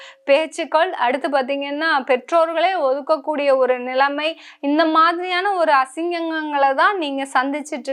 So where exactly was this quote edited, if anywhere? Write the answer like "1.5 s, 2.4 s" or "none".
none

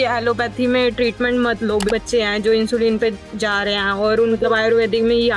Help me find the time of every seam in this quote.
1.9 s, 4.4 s

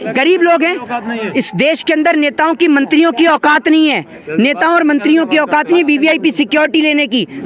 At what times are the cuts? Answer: none

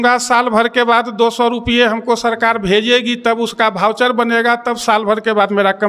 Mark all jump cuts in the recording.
none

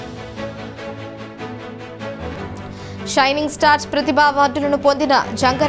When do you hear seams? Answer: 1.0 s

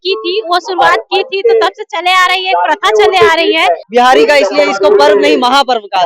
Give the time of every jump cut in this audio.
3.8 s

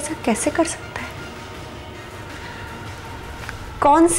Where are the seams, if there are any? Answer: none

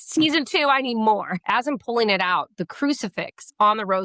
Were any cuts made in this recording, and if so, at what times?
1.3 s

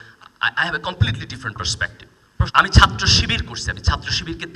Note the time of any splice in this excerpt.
2.5 s

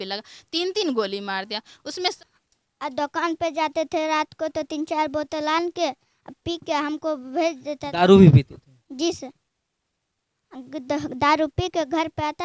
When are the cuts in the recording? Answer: 2.1 s

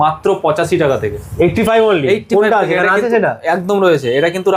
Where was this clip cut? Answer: none

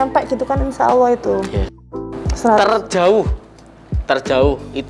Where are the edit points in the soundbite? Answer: 1.8 s

